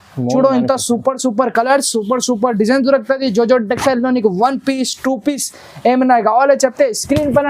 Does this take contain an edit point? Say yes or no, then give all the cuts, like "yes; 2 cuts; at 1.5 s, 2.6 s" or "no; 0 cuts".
no; 0 cuts